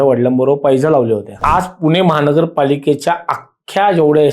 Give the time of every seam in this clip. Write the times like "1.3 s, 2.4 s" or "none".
1.4 s